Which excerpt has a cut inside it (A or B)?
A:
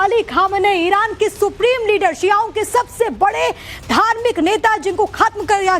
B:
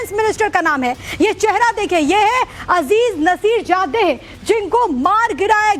A